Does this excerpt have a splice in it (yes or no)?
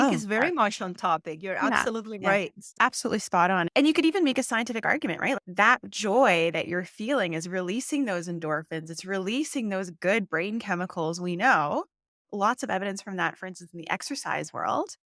yes